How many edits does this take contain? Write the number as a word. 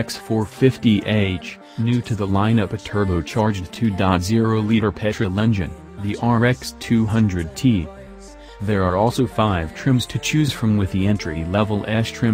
one